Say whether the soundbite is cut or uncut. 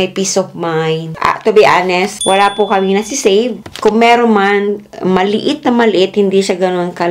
cut